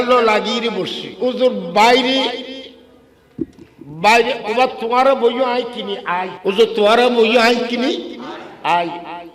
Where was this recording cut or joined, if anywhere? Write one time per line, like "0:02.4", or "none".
0:01.0
0:06.3